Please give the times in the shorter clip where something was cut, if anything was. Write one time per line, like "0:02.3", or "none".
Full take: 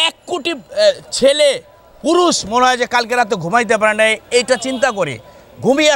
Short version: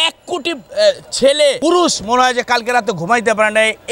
0:01.6